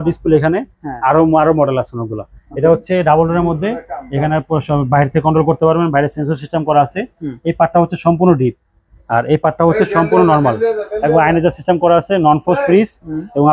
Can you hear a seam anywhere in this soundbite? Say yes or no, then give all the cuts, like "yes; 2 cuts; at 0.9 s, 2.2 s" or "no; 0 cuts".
no; 0 cuts